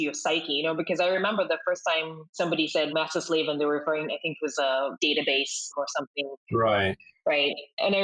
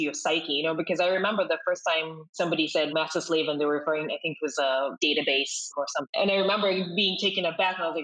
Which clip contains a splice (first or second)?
second